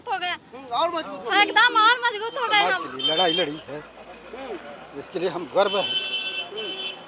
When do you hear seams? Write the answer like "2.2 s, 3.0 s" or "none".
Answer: 2.8 s